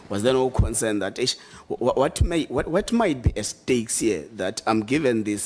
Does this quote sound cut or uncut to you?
uncut